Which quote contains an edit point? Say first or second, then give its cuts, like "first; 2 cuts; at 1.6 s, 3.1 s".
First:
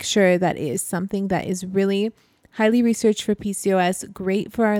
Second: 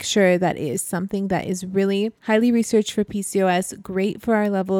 second; 1 cut; at 2.2 s